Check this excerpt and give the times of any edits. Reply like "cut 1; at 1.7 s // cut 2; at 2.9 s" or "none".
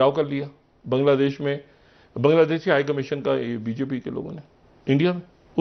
none